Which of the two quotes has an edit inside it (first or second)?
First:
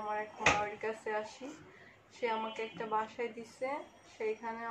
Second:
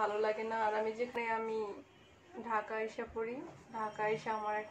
second